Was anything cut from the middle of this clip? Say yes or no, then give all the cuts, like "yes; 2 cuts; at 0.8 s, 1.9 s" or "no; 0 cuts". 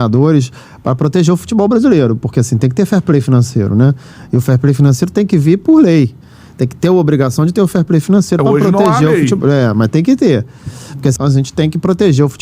yes; 1 cut; at 11.1 s